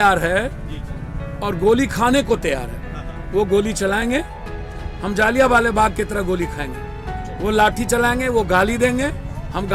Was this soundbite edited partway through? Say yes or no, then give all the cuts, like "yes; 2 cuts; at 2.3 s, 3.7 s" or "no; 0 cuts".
no; 0 cuts